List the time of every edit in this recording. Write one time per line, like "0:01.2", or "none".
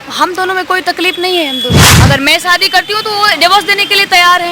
0:01.9